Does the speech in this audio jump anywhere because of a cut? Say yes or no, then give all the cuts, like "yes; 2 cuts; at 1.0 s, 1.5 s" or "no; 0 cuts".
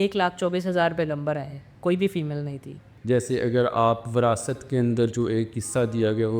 yes; 1 cut; at 2.9 s